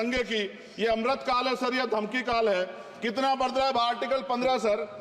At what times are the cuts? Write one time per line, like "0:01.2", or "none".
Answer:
none